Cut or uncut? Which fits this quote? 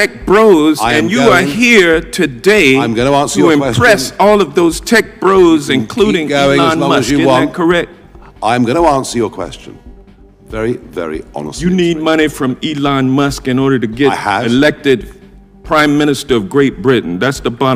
uncut